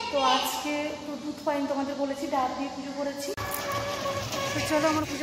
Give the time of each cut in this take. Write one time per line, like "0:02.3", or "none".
0:03.4